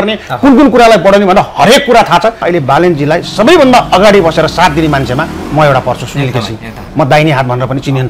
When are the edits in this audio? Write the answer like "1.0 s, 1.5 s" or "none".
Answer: 2.4 s